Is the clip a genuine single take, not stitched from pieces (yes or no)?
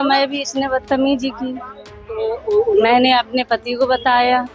no